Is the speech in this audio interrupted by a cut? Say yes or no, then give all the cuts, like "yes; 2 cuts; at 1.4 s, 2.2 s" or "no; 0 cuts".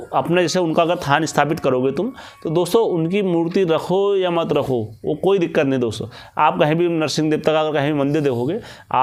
no; 0 cuts